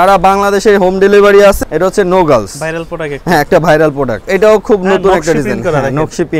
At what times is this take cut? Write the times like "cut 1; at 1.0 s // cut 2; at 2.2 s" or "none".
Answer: cut 1; at 1.6 s // cut 2; at 4.2 s